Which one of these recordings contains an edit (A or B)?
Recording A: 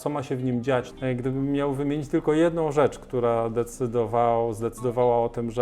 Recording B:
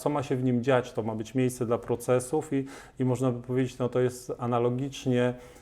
A